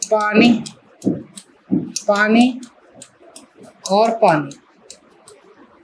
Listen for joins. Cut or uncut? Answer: uncut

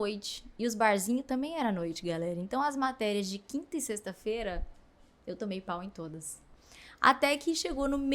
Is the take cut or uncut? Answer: uncut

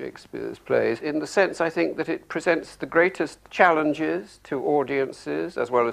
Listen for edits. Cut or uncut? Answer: cut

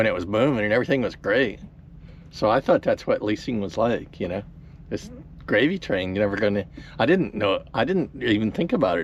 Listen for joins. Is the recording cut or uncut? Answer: uncut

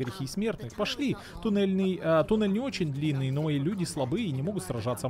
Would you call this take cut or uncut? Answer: uncut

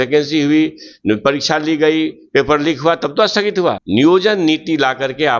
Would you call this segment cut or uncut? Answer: cut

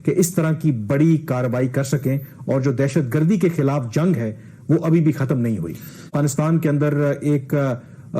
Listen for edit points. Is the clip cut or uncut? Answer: cut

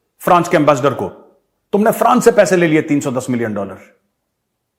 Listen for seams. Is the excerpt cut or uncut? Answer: uncut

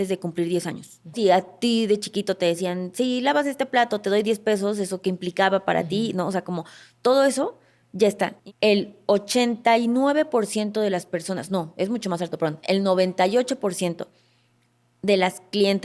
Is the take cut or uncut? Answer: cut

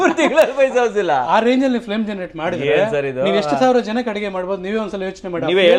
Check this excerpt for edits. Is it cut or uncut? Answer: uncut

